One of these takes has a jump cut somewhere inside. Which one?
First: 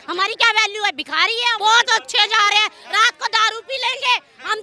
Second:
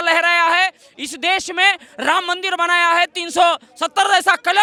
first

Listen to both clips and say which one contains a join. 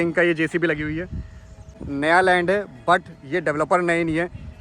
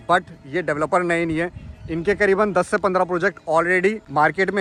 first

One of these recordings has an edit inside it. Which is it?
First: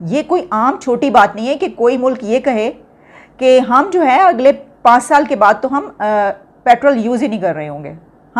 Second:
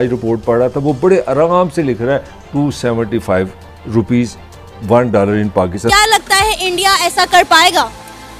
second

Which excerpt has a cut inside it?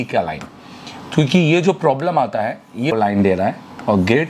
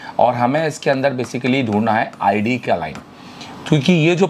first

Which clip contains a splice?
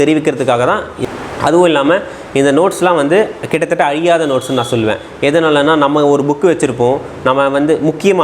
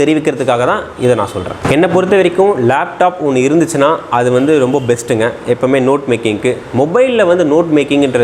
first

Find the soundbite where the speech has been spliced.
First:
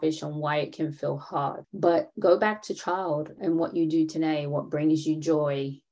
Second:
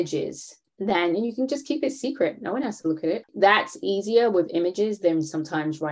first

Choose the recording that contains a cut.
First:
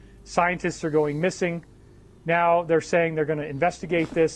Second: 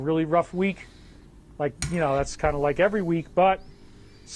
first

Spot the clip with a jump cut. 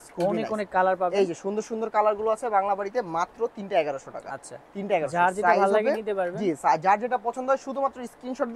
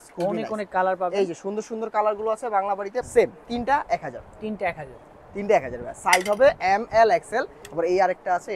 second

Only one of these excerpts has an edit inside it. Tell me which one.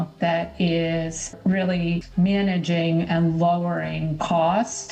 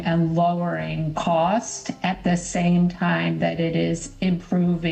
first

